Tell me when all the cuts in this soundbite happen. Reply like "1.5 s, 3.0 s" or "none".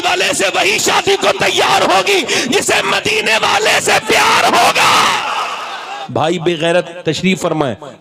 5.9 s

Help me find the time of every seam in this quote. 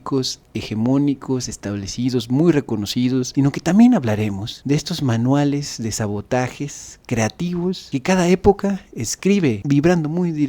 3.3 s, 9.6 s

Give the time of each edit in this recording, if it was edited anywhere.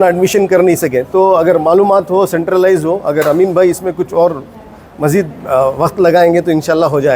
none

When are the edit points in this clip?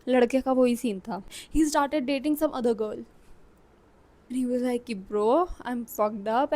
1.3 s, 4.3 s

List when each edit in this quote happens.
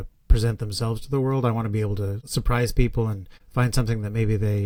none

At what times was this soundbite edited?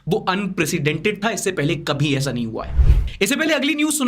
none

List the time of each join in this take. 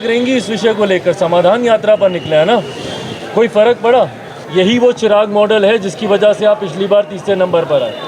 4.4 s

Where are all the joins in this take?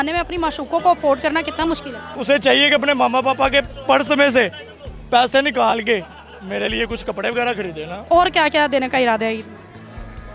2.1 s, 8.0 s

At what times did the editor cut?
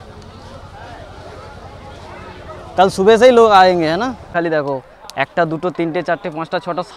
4.3 s

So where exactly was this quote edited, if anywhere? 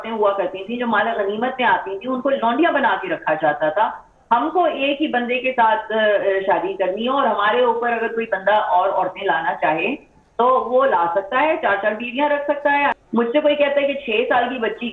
13.0 s

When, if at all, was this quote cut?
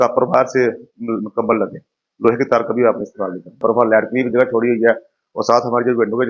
3.6 s

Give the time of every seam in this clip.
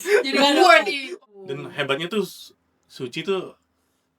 1.0 s

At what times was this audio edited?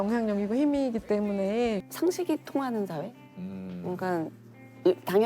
1.9 s

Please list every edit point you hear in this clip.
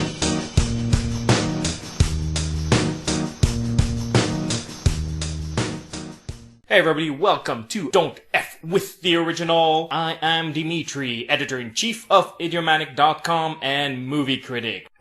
none

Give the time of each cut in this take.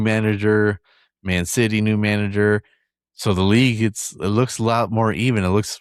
none

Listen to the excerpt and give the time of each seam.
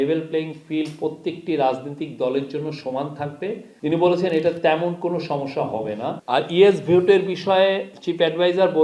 6.2 s

